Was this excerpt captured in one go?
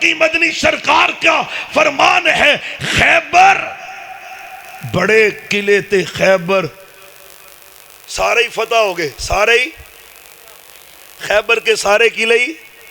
yes; 0 cuts

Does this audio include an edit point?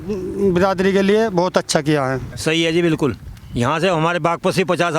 yes; 1 cut; at 2.3 s

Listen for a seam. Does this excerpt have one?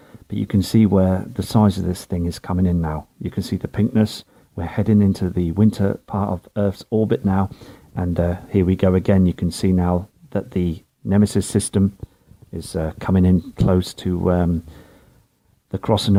no; 0 cuts

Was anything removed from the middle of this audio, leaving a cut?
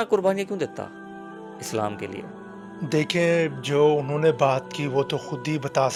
no; 0 cuts

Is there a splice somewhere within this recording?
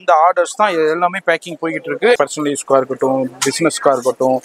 yes; 1 cut; at 2.2 s

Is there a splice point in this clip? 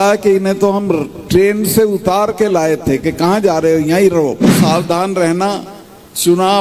yes; 1 cut; at 4.5 s

